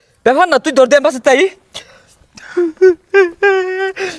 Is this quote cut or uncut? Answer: uncut